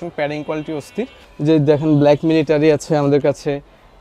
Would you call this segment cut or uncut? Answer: cut